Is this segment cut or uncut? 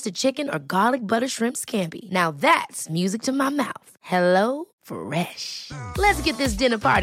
uncut